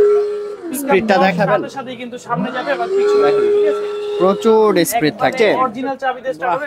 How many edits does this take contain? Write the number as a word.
one